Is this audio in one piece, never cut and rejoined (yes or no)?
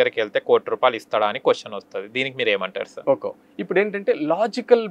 yes